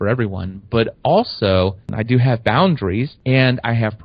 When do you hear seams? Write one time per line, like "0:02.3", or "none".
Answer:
0:01.9
0:03.1

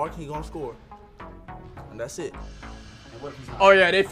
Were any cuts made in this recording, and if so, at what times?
none

